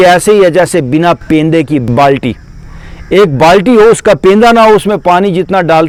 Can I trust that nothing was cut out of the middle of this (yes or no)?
yes